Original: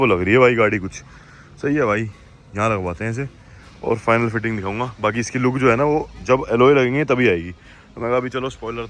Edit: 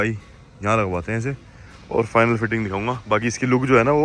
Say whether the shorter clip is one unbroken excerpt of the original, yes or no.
yes